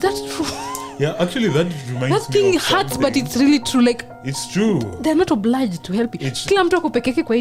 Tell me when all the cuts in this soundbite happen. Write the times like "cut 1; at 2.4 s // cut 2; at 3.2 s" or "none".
none